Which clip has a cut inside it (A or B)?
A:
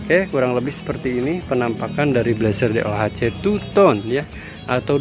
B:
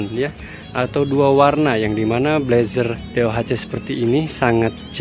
B